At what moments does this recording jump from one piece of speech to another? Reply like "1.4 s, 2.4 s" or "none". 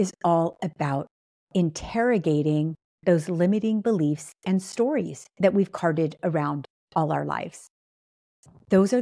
none